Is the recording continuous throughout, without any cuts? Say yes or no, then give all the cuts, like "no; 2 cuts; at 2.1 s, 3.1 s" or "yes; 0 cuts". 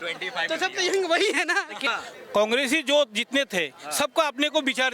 no; 1 cut; at 1.8 s